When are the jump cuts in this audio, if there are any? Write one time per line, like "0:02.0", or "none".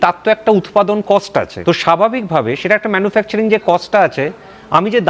0:01.5

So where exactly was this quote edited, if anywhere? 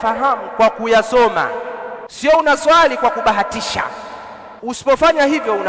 0:02.1
0:04.8

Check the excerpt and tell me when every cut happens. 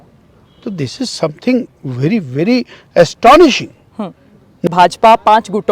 0:04.7

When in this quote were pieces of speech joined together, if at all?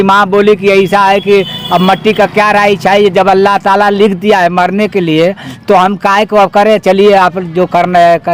none

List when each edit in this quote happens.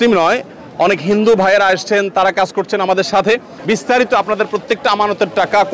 0:03.5

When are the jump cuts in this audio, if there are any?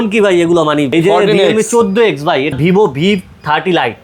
0:00.9
0:02.5

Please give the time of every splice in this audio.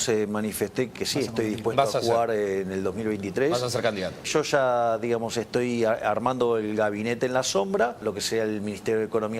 0:00.9
0:04.3
0:08.0

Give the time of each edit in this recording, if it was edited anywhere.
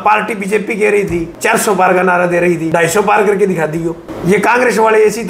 0:01.3
0:02.6
0:04.1

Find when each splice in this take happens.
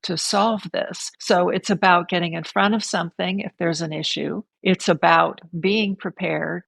none

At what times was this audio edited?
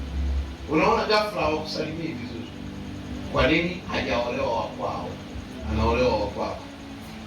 0:05.6

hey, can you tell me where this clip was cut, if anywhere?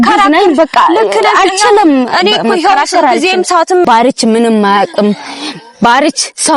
0:03.9

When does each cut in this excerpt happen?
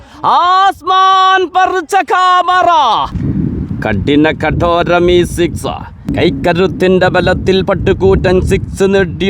0:03.2
0:06.0

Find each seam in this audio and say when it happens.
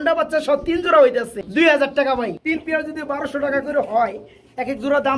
0:01.4
0:02.4

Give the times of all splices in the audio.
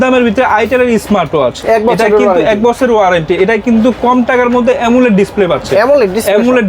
none

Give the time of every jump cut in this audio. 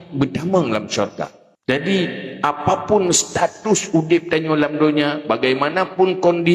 0:01.4

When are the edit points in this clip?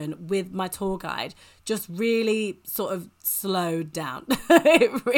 none

